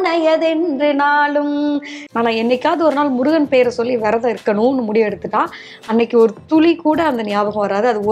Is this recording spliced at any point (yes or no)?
yes